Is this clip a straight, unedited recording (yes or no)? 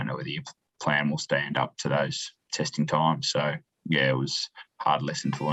yes